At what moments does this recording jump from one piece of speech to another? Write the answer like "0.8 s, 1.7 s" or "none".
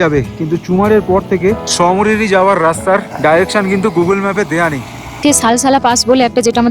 1.7 s, 3.1 s, 5.0 s